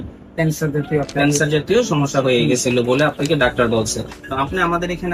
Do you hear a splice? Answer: yes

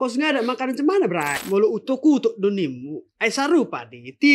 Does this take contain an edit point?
yes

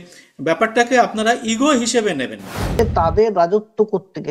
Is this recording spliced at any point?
yes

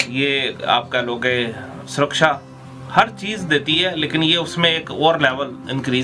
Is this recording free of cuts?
yes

